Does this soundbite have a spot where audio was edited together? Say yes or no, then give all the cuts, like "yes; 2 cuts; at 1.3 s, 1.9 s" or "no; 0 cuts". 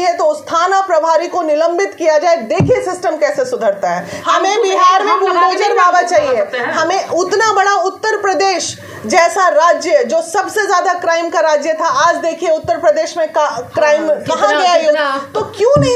yes; 1 cut; at 4.2 s